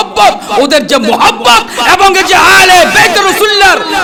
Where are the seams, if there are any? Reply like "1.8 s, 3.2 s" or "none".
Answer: none